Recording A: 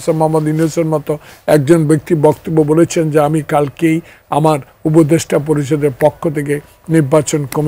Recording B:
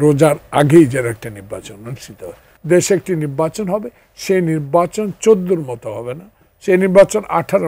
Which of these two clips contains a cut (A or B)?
B